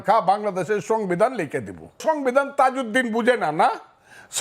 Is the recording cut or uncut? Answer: cut